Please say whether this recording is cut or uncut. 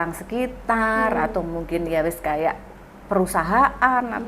uncut